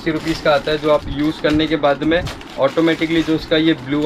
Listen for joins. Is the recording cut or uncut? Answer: uncut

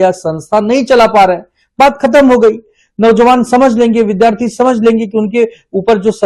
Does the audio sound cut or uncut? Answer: uncut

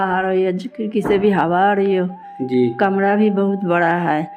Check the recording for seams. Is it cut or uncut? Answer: uncut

